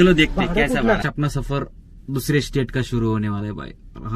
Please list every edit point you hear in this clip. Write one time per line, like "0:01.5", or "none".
0:01.0